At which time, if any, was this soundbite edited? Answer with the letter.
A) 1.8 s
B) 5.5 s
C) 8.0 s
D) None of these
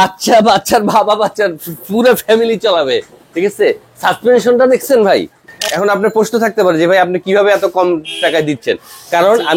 B